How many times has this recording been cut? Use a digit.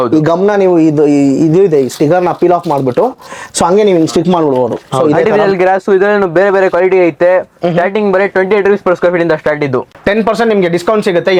2